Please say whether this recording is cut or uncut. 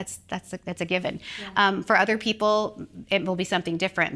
uncut